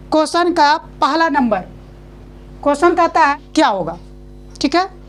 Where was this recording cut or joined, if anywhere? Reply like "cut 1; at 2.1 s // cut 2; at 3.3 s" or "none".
cut 1; at 3.4 s